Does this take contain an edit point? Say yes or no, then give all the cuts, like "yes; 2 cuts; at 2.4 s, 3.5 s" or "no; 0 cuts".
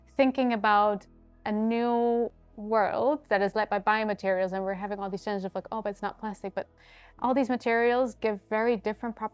no; 0 cuts